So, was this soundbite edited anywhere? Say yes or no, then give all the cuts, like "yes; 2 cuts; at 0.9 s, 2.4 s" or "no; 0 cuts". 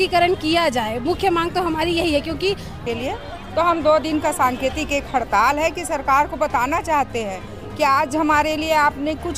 yes; 1 cut; at 2.8 s